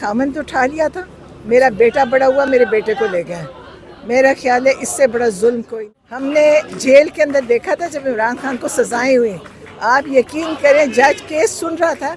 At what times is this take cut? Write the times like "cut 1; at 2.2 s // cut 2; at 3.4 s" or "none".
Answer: cut 1; at 5.7 s